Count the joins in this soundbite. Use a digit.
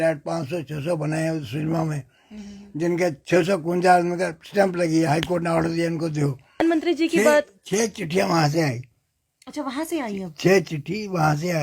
1